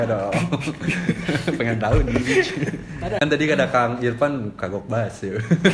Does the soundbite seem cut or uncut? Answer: cut